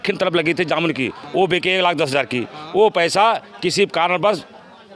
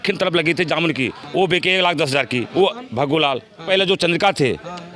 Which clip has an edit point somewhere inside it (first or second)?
second